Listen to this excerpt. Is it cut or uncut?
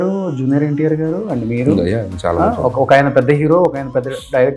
uncut